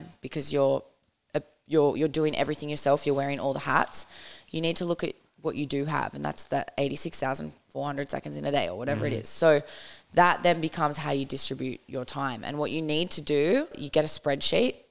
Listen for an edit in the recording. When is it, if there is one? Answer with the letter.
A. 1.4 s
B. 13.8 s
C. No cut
B